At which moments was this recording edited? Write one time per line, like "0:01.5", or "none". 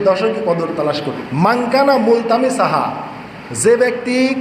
0:01.2